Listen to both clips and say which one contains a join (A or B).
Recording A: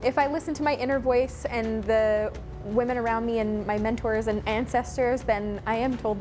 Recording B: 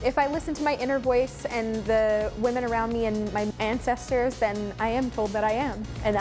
B